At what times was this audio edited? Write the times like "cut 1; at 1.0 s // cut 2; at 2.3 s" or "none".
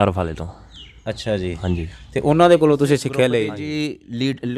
cut 1; at 3.6 s